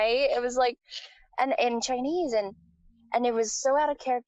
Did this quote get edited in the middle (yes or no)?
no